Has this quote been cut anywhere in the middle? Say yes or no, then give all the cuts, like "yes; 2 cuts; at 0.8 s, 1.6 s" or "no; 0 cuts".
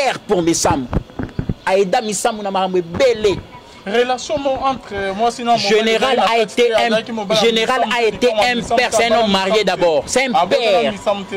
no; 0 cuts